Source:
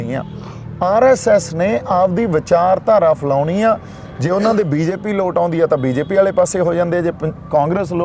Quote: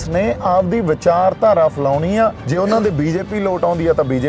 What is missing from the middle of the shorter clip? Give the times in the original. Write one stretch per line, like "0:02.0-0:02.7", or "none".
0:03.9-0:04.2